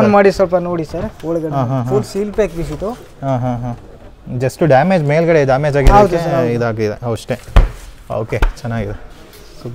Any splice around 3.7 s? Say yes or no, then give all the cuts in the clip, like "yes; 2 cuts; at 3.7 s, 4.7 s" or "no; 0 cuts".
no; 0 cuts